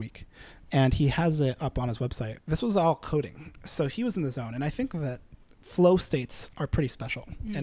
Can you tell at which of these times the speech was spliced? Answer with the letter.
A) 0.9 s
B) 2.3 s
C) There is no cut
B